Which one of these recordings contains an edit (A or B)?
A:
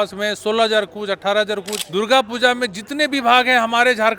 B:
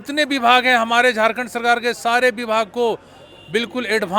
A